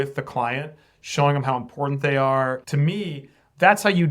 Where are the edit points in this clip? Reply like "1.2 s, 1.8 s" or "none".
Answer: 2.6 s